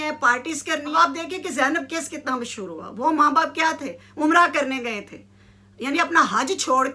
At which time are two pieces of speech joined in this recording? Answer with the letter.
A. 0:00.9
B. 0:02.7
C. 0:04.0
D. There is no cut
A